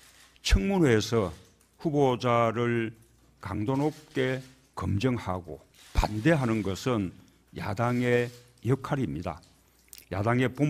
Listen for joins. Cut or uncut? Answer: cut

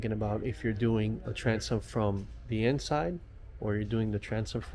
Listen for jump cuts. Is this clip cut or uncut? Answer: uncut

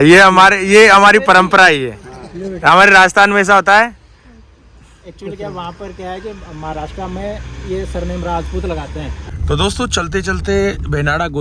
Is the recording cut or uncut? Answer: cut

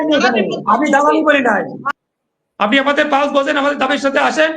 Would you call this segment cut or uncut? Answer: cut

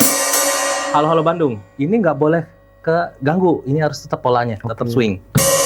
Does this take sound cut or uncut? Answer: uncut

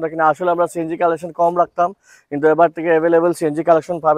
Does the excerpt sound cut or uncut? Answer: uncut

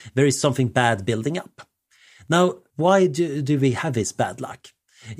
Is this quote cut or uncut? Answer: cut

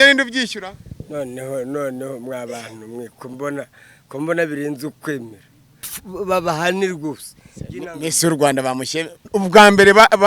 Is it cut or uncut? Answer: cut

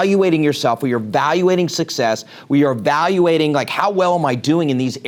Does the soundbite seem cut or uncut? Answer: uncut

